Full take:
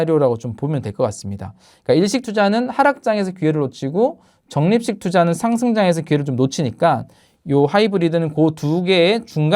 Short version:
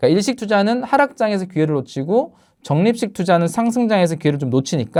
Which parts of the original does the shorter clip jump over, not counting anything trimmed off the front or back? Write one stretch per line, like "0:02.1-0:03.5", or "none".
none